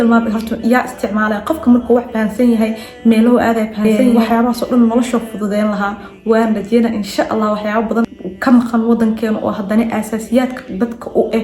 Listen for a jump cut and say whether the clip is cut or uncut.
cut